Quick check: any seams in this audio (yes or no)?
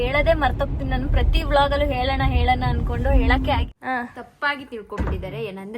yes